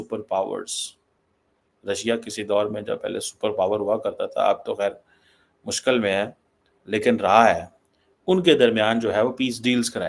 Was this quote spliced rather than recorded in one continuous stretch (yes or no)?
no